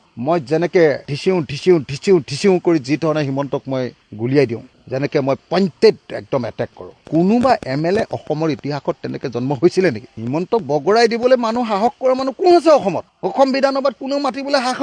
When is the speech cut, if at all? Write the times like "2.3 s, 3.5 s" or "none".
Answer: 4.7 s